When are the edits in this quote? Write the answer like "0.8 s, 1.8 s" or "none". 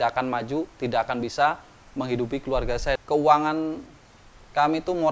3.0 s